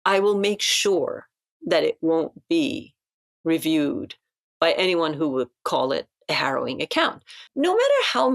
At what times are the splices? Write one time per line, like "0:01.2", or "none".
0:07.4